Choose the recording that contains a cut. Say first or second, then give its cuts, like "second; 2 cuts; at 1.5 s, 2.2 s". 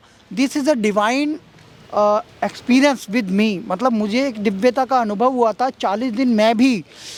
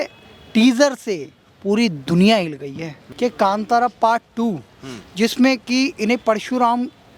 second; 1 cut; at 3.0 s